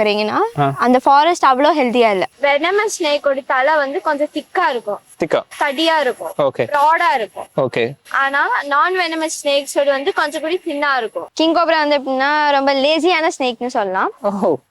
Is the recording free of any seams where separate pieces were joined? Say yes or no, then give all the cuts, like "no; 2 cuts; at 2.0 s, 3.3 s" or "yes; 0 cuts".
no; 2 cuts; at 2.3 s, 11.2 s